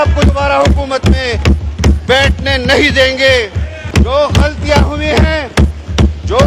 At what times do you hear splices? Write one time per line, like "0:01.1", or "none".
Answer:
0:03.8